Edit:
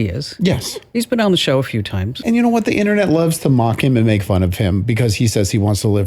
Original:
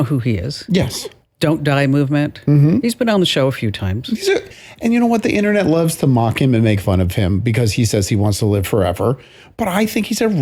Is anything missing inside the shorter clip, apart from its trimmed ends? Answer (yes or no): yes